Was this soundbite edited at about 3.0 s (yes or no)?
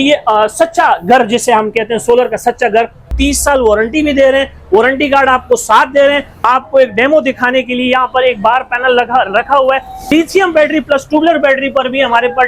yes